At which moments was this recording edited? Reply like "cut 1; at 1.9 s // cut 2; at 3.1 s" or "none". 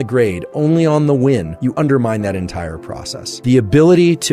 cut 1; at 1.6 s // cut 2; at 3.3 s